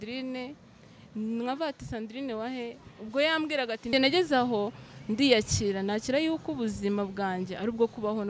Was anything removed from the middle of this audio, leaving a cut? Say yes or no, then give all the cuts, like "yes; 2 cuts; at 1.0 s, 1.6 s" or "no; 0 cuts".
yes; 1 cut; at 3.9 s